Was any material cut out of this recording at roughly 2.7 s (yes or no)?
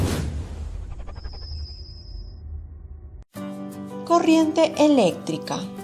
yes